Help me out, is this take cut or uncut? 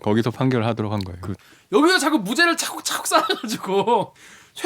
cut